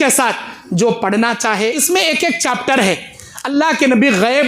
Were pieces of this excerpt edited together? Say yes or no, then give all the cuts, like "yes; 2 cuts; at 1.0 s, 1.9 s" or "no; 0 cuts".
yes; 1 cut; at 1.8 s